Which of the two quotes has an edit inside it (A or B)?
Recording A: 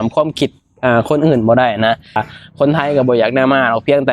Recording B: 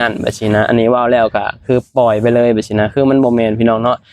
A